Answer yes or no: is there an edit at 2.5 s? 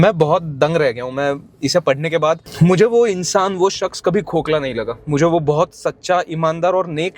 yes